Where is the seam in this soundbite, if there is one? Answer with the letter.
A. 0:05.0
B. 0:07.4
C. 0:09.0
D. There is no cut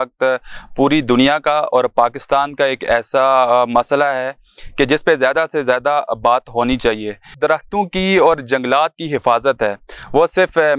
B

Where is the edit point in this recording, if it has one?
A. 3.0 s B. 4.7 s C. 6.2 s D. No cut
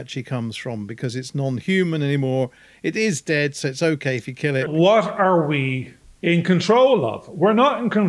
B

